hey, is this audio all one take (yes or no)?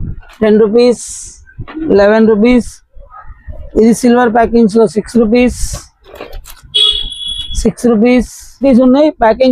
no